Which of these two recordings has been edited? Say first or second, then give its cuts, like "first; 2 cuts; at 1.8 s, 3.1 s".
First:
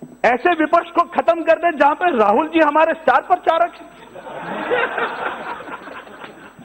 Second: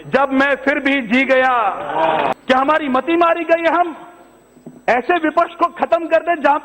second; 1 cut; at 2.3 s